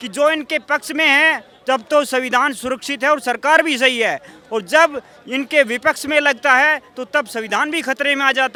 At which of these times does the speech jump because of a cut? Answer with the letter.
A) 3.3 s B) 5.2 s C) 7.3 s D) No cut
D